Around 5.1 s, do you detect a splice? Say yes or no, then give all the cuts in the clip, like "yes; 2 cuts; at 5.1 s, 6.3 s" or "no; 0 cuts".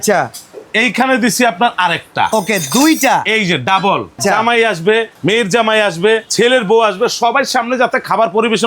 yes; 3 cuts; at 4.2 s, 5.1 s, 6.3 s